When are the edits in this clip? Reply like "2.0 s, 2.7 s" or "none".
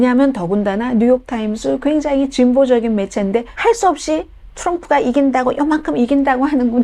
3.5 s